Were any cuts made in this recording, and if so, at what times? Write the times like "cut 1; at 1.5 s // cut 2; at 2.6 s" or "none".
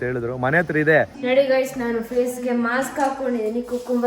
cut 1; at 1.1 s

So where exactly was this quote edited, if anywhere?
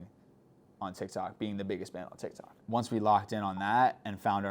cut 1; at 2.5 s

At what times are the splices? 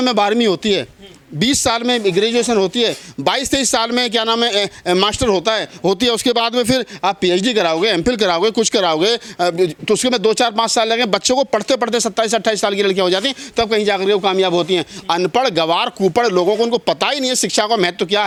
none

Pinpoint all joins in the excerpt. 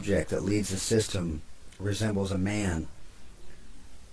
cut 1; at 1.2 s

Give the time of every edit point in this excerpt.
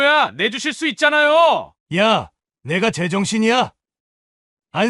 cut 1; at 1.7 s

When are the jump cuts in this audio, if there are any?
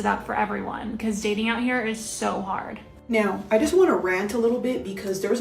cut 1; at 3.1 s

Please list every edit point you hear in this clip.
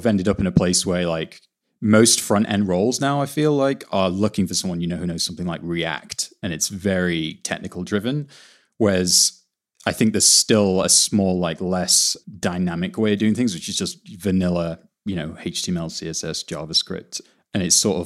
cut 1; at 17.2 s

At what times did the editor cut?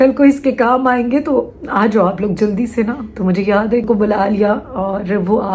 none

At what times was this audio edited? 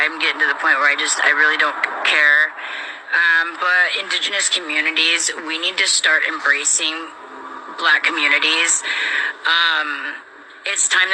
cut 1; at 6.7 s

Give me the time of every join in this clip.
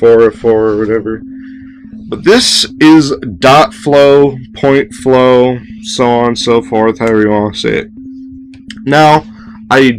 cut 1; at 7.4 s

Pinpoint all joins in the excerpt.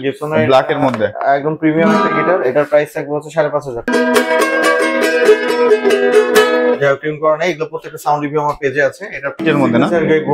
cut 1; at 3.9 s // cut 2; at 9.4 s

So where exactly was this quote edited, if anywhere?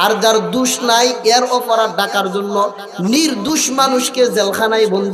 none

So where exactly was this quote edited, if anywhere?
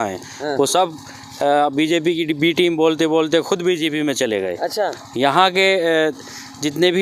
none

